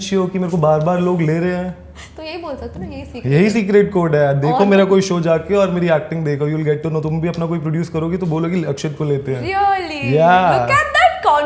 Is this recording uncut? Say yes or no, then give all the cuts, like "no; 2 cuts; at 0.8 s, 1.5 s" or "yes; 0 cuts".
yes; 0 cuts